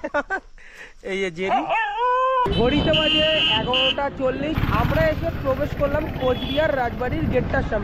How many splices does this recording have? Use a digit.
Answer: 1